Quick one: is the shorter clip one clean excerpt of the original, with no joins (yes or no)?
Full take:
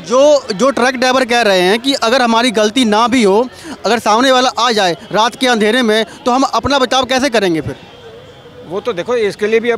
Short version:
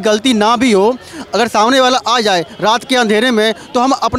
yes